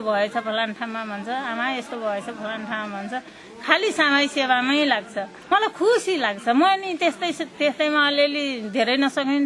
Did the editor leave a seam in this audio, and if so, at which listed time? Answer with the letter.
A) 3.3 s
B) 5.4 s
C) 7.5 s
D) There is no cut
B